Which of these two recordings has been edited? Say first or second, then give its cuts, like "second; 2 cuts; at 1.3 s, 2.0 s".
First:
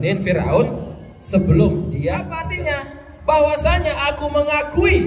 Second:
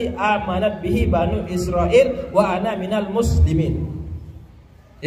first; 1 cut; at 2.5 s